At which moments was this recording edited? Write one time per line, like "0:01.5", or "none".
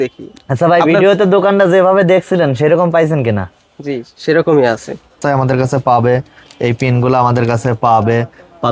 0:05.2

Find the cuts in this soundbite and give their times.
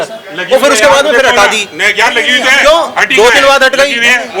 none

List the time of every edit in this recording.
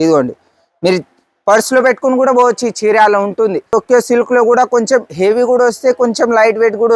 0:03.7

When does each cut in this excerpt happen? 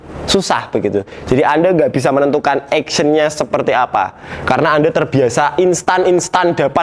none

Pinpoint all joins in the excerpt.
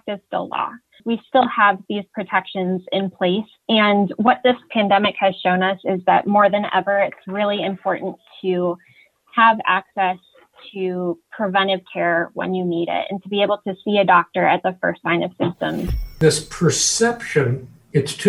0:01.0
0:16.2

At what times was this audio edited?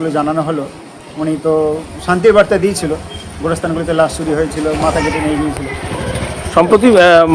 none

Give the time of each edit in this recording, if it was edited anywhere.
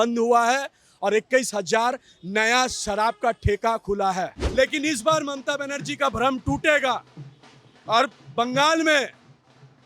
0:04.4

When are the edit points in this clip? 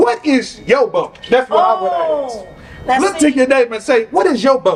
none

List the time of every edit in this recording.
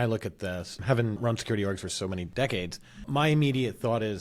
0:01.2
0:02.3
0:03.0

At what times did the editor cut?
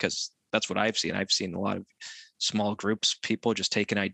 none

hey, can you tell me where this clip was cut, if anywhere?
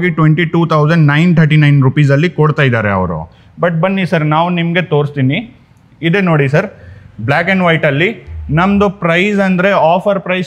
none

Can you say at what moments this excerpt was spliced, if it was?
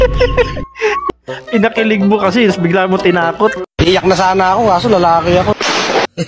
0:01.1

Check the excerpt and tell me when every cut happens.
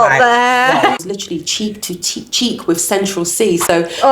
0:01.0

